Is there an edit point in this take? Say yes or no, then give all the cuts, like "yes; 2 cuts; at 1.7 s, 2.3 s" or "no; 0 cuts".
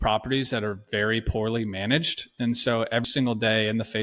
no; 0 cuts